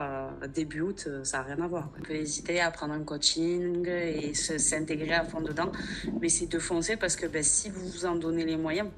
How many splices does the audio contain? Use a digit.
1